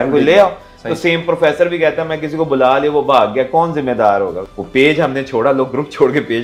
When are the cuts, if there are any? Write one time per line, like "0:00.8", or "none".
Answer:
0:04.5